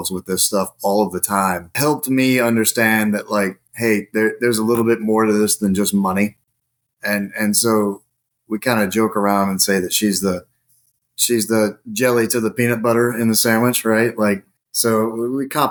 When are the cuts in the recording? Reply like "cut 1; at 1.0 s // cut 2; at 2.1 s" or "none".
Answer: none